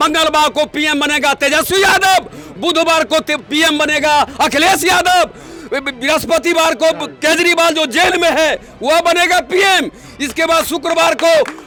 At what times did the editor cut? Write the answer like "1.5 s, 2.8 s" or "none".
none